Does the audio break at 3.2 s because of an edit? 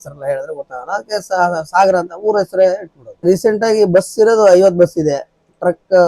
yes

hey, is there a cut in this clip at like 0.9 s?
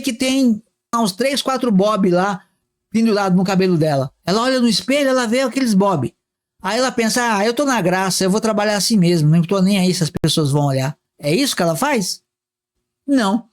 yes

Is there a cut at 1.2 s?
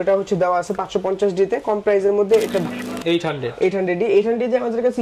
no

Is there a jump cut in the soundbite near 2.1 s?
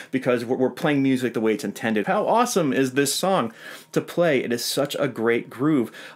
yes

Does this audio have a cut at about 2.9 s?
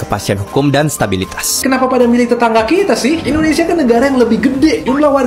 no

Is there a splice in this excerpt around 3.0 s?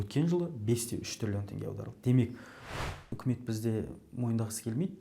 yes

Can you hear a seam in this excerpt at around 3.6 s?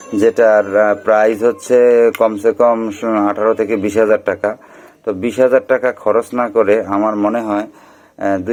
no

